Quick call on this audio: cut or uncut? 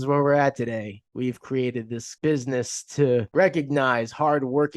cut